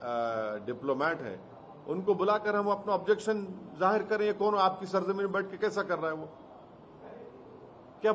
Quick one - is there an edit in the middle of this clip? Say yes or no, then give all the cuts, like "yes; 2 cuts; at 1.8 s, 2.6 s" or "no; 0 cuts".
no; 0 cuts